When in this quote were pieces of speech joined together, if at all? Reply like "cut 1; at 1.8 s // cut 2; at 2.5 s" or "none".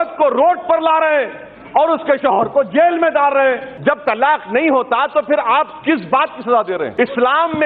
cut 1; at 3.7 s // cut 2; at 6.9 s